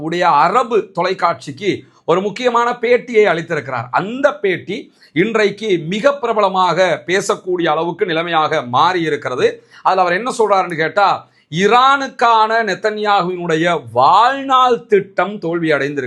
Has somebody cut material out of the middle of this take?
no; 0 cuts

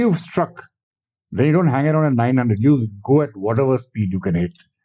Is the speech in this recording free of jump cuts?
yes; 0 cuts

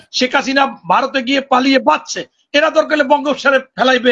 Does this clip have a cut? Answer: no; 0 cuts

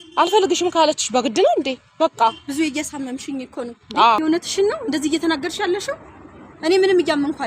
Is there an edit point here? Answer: yes; 1 cut; at 4.2 s

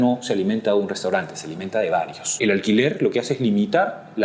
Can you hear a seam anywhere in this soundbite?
yes; 1 cut; at 2.2 s

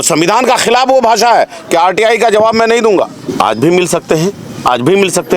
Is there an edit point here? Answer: yes; 1 cut; at 3.3 s

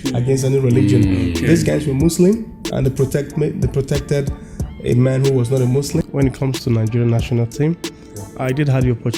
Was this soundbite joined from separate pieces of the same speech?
yes; 1 cut; at 6.0 s

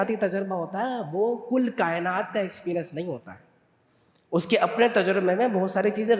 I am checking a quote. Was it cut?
no; 0 cuts

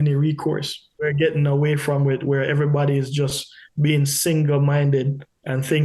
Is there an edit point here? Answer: yes; 1 cut; at 1.0 s

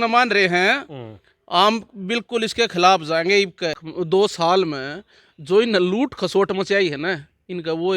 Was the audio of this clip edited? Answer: yes; 1 cut; at 3.8 s

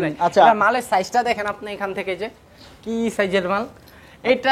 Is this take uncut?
yes; 0 cuts

